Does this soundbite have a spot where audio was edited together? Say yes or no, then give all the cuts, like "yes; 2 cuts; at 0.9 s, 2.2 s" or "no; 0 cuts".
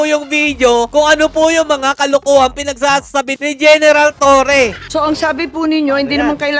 yes; 3 cuts; at 0.9 s, 3.4 s, 4.8 s